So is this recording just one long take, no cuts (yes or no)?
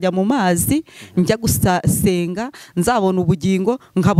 yes